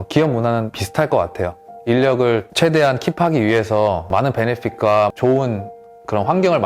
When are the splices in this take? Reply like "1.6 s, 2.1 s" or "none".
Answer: 0.8 s, 2.5 s, 4.1 s